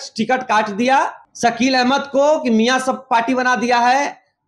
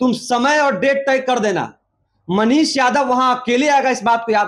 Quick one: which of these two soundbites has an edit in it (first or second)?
first